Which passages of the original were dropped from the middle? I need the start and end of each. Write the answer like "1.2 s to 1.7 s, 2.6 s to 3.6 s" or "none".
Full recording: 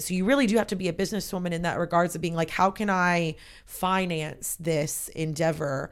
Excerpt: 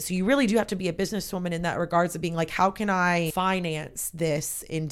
3.3 s to 3.8 s